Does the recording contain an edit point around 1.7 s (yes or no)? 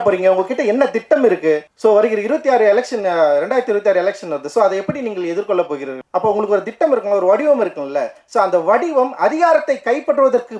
yes